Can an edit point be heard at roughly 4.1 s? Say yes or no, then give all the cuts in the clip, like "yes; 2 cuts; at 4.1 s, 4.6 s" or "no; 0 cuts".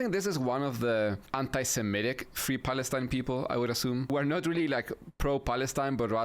yes; 1 cut; at 4.1 s